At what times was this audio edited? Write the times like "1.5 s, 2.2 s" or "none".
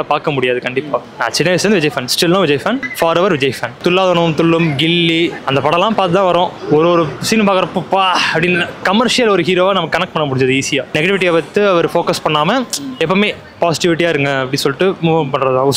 none